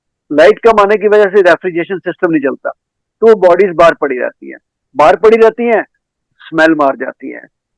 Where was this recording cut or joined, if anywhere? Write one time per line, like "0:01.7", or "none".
none